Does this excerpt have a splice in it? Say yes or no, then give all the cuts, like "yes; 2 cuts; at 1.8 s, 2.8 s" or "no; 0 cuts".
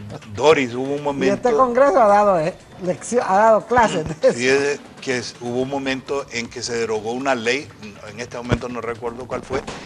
no; 0 cuts